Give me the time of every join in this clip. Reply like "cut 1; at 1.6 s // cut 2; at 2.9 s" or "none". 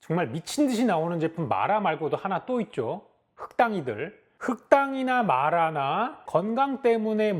cut 1; at 4.3 s